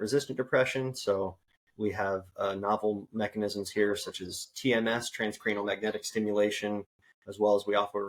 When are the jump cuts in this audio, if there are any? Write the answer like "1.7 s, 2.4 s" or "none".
none